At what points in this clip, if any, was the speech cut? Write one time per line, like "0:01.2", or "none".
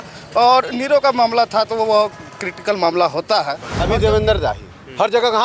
0:03.7

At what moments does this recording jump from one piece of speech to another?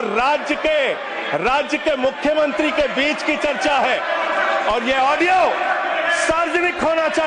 none

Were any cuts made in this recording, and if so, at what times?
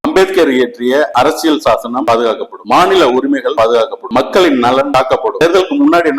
0:01.1
0:02.0
0:03.7
0:05.4

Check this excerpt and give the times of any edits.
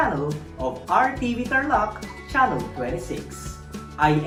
none

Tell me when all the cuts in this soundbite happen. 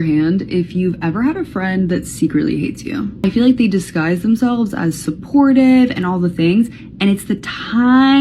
0:03.2

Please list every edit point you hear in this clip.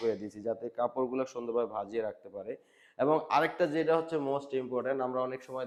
none

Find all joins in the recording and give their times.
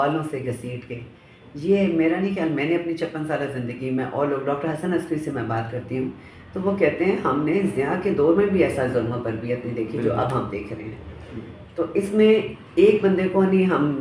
none

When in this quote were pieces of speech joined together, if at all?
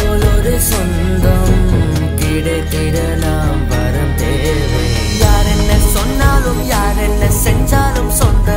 none

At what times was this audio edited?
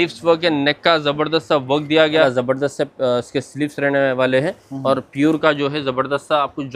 0:02.2

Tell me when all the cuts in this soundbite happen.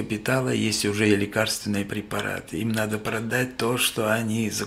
none

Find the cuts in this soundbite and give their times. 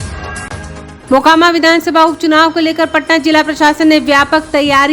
0:00.9

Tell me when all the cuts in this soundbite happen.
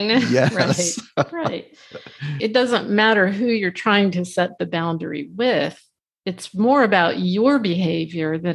0:02.3

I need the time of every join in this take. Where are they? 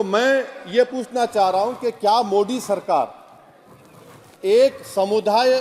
none

